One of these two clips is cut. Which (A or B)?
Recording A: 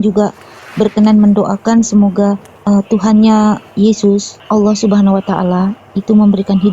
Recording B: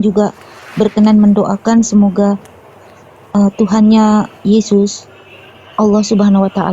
A